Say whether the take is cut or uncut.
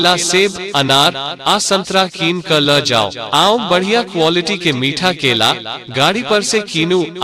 cut